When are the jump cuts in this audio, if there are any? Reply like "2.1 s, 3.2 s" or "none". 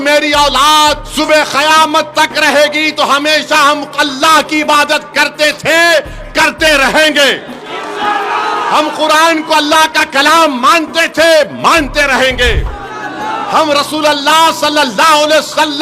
1.0 s